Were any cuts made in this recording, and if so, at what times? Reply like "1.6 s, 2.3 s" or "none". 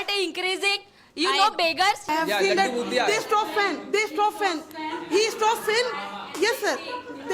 2.1 s